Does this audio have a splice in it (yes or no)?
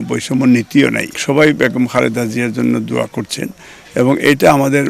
yes